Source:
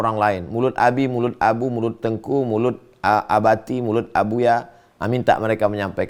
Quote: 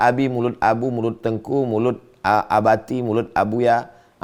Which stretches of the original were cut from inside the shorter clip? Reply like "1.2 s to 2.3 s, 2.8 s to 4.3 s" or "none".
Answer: none